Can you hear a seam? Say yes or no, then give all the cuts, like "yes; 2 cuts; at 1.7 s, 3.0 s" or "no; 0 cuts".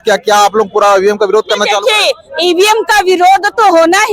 no; 0 cuts